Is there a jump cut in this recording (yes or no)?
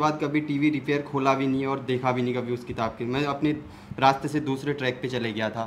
no